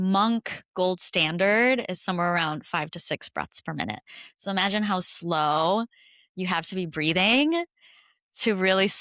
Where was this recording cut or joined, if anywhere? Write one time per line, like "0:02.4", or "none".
none